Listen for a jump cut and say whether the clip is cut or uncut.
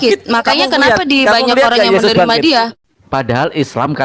cut